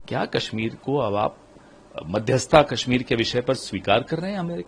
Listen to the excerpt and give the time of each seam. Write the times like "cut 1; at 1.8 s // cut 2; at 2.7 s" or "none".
none

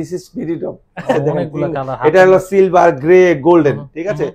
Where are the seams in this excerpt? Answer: cut 1; at 1.1 s

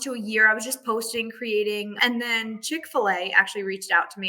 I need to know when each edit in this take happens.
cut 1; at 1.9 s

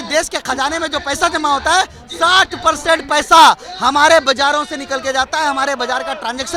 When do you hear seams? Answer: none

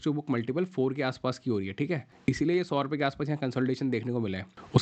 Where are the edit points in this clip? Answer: cut 1; at 2.1 s

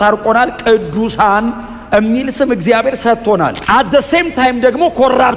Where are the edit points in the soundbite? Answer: cut 1; at 3.6 s

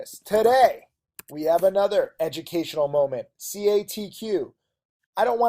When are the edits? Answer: cut 1; at 1.2 s

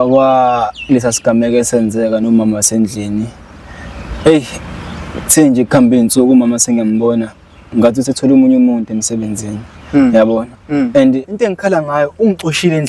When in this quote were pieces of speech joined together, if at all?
cut 1; at 11.3 s

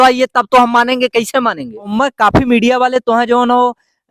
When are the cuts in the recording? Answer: cut 1; at 1.8 s

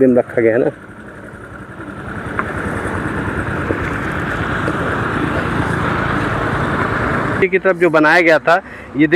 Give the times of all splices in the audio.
cut 1; at 7.4 s

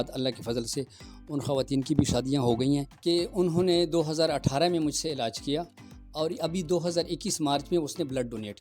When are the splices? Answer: cut 1; at 2.9 s

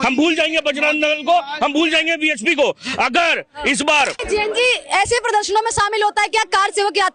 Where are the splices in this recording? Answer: cut 1; at 4.2 s

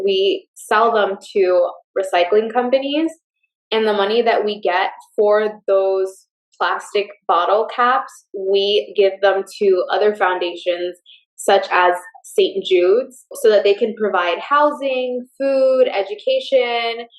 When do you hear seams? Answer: cut 1; at 13.3 s

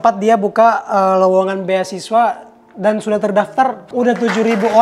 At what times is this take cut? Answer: cut 1; at 3.8 s

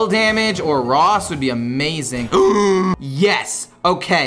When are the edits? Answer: cut 1; at 2.9 s

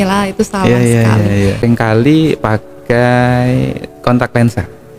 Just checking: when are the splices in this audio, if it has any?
cut 1; at 1.6 s

